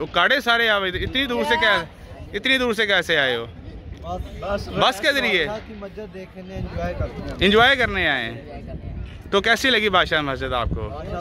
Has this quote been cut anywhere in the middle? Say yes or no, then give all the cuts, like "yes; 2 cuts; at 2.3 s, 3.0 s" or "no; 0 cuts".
no; 0 cuts